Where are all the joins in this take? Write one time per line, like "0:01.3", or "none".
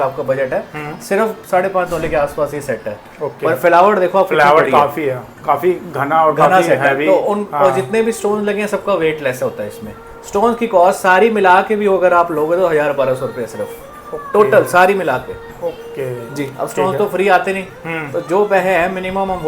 none